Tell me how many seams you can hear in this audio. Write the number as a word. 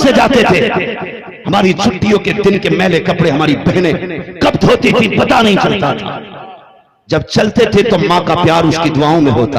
zero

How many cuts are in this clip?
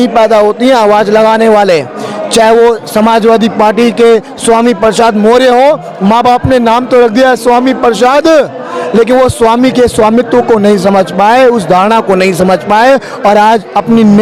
zero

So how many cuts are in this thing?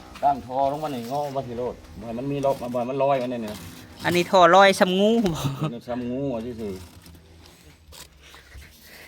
one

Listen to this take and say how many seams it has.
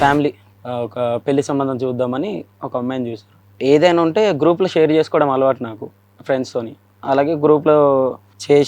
two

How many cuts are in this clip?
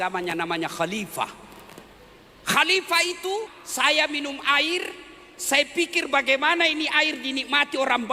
one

